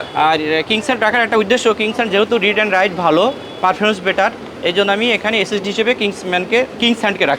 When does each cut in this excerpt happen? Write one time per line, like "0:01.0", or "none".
none